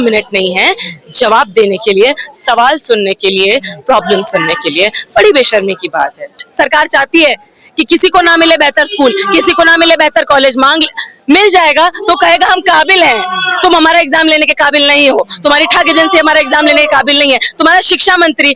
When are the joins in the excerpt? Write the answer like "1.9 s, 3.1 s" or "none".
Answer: 6.4 s